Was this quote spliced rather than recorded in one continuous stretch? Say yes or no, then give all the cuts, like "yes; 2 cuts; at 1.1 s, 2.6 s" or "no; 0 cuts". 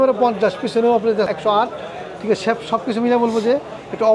yes; 1 cut; at 1.3 s